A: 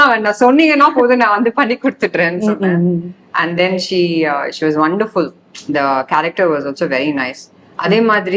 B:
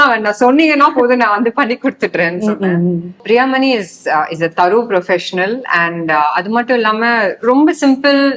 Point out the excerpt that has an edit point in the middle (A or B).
B